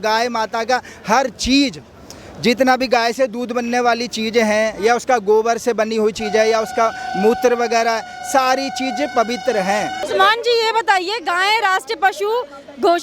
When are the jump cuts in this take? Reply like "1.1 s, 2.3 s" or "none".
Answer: 10.1 s